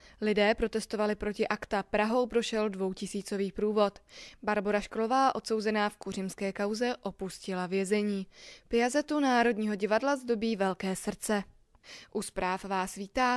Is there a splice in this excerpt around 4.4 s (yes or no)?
no